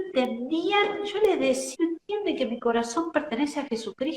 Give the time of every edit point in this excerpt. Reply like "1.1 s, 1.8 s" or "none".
1.7 s